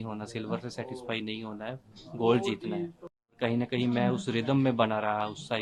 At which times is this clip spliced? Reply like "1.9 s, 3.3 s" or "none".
3.3 s